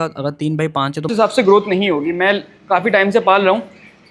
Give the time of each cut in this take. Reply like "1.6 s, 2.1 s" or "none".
1.1 s